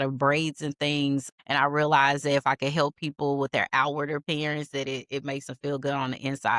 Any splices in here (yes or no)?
yes